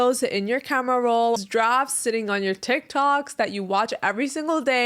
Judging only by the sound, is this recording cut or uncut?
cut